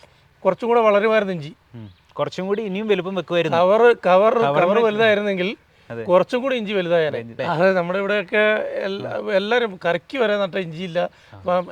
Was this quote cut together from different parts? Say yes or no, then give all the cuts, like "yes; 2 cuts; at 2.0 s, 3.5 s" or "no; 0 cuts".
yes; 1 cut; at 7.3 s